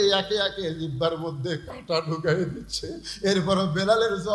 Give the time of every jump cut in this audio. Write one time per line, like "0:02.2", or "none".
none